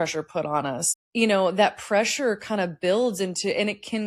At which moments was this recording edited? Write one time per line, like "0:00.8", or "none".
none